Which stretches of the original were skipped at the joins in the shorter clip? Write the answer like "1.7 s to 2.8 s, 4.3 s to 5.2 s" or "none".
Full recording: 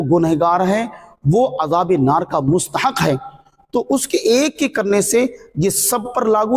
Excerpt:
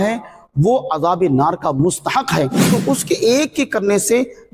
3.3 s to 3.6 s